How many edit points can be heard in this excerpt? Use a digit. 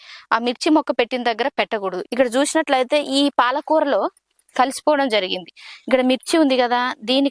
1